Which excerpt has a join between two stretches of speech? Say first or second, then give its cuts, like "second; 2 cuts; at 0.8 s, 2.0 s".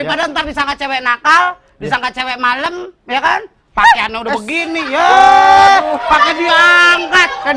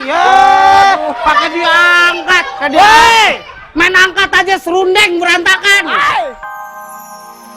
second; 1 cut; at 6.4 s